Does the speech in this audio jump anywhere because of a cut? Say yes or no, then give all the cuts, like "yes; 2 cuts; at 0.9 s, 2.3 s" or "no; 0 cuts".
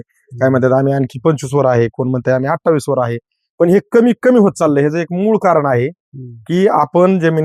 no; 0 cuts